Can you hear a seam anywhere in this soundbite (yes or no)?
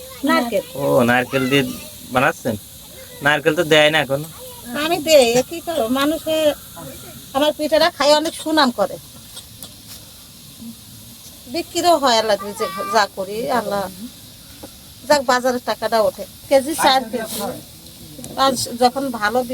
yes